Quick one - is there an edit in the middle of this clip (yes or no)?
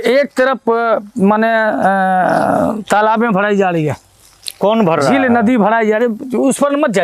no